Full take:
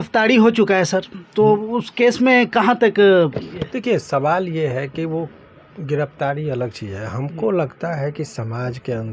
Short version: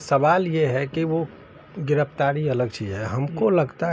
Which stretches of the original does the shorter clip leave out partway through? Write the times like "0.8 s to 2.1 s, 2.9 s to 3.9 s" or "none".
none